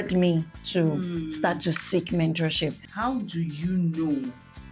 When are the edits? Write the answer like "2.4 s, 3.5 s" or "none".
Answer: 2.8 s